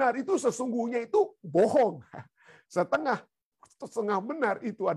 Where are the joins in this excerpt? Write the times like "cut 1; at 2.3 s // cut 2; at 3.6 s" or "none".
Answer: none